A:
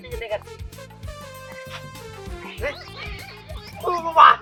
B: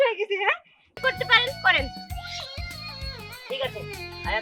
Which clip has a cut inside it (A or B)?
B